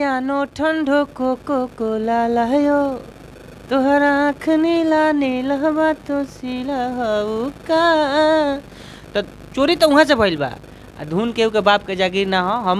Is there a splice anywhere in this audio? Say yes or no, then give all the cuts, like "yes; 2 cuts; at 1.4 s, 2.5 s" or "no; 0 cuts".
no; 0 cuts